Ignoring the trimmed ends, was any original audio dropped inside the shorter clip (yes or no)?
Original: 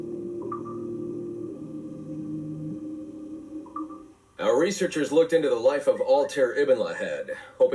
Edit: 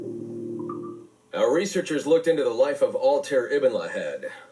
yes